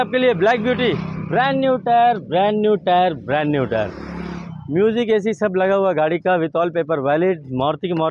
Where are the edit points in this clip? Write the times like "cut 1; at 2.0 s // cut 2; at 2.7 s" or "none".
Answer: none